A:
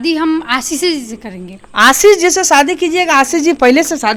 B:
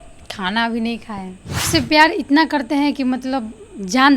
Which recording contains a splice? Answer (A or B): B